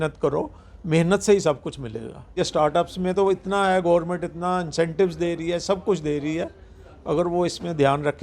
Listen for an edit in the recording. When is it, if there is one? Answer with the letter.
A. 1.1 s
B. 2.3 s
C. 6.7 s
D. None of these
B